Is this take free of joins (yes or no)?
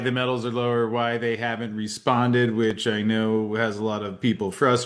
yes